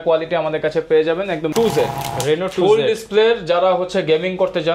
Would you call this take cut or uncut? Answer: cut